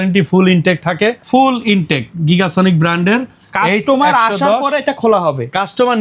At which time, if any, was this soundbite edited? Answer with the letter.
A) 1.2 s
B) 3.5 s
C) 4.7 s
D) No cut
A